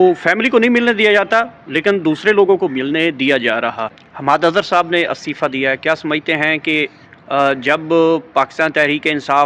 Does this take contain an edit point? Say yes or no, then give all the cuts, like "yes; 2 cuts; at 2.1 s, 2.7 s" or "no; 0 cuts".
yes; 1 cut; at 3.9 s